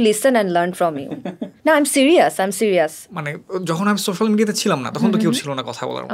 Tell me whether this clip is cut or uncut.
uncut